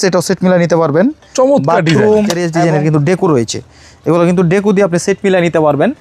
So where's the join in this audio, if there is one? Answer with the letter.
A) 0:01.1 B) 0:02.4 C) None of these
B